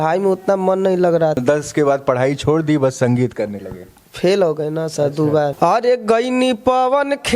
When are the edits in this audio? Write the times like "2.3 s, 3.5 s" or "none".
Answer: 1.4 s, 5.5 s

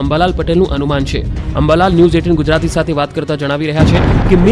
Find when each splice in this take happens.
none

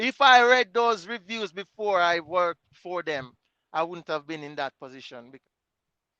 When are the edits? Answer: 5.2 s

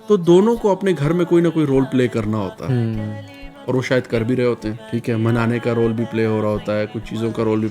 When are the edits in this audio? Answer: 4.8 s

